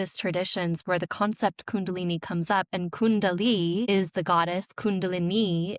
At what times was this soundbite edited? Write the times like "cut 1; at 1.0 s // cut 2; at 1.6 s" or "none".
cut 1; at 3.9 s